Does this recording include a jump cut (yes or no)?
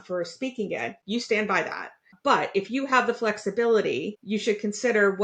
yes